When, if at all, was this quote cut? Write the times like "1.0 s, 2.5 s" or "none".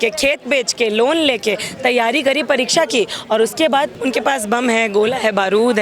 3.9 s